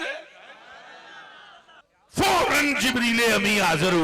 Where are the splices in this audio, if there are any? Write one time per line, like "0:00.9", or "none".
0:01.8